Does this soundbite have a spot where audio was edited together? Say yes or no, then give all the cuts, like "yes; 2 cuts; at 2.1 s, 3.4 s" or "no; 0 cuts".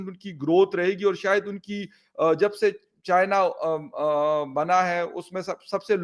no; 0 cuts